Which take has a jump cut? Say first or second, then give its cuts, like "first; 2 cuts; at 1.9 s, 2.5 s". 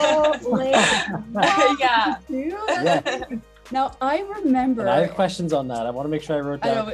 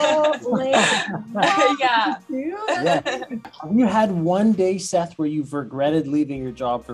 second; 1 cut; at 3.5 s